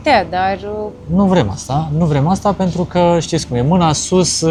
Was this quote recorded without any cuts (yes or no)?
yes